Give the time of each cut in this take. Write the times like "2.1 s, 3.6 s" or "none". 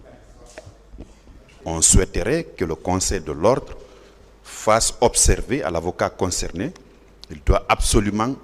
1.5 s